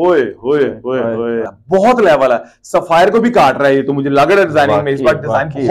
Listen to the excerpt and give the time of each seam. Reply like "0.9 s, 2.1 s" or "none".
1.5 s

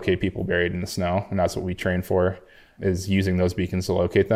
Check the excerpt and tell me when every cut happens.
2.7 s

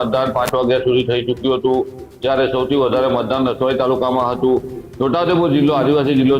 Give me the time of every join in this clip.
none

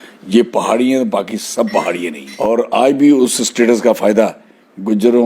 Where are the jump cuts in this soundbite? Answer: 2.2 s

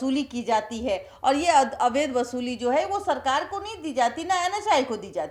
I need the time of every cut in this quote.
none

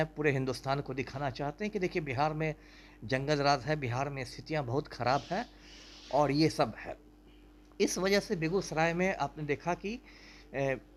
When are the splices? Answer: none

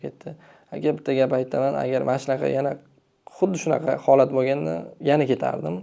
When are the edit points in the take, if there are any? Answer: 4.9 s

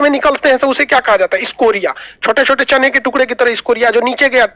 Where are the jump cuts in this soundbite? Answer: none

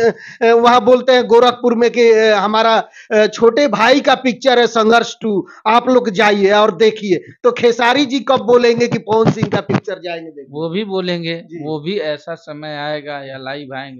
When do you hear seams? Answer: none

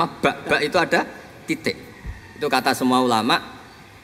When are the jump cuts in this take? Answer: none

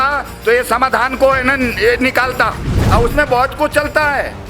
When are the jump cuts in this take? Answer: 2.8 s

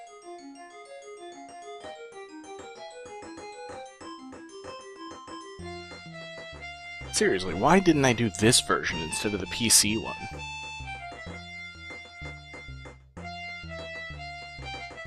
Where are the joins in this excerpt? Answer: 7.3 s

